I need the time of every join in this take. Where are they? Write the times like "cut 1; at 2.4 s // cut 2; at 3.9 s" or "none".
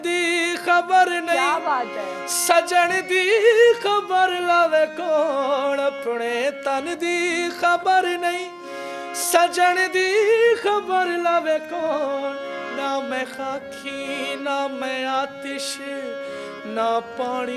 none